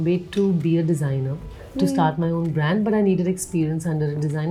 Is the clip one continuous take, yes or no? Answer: yes